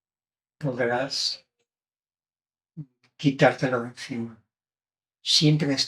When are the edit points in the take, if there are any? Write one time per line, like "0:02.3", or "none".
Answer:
none